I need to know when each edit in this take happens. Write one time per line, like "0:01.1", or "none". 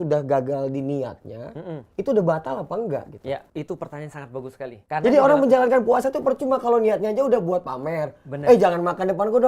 0:03.5
0:04.8